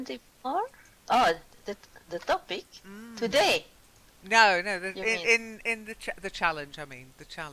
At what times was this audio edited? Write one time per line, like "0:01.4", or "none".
none